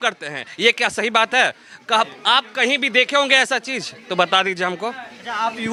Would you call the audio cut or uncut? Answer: uncut